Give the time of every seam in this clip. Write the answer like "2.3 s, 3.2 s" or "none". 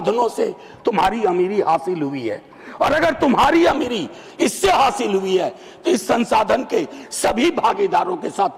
none